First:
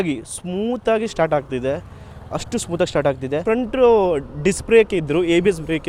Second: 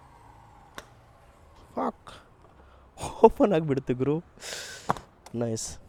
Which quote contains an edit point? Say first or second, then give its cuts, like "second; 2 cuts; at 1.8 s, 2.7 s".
first; 1 cut; at 3.4 s